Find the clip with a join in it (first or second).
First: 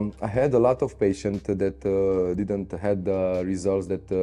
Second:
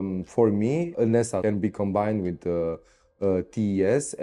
second